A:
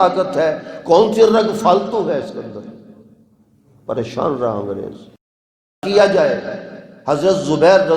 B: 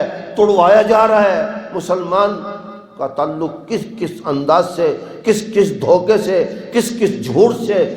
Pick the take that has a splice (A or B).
A